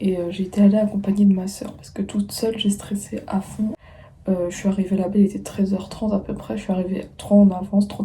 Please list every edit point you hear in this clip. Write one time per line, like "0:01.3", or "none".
0:03.8

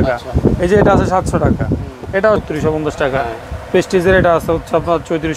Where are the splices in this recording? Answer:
0:02.4

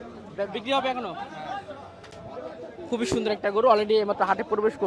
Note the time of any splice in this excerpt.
none

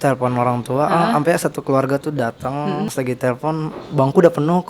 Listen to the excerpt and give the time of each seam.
0:02.9

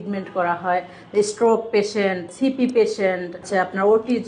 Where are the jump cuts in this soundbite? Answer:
0:02.3
0:03.4

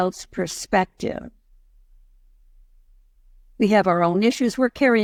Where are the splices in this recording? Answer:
none

